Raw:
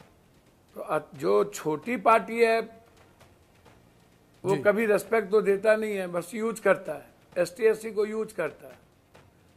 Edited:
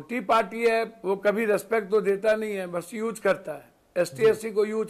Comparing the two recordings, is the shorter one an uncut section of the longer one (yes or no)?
no